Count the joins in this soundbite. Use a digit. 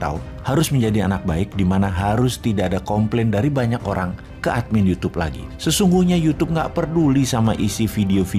0